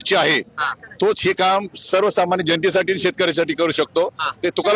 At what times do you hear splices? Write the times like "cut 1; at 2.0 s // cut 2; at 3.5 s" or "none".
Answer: none